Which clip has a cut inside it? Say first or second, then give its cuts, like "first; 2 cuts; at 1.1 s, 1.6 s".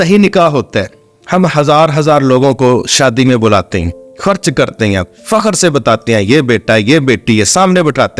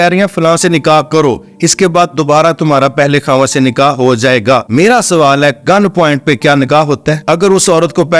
second; 2 cuts; at 4.7 s, 7.2 s